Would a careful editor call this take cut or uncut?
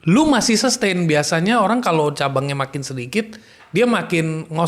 uncut